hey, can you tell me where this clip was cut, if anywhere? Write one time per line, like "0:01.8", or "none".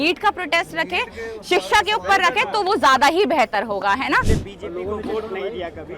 0:04.3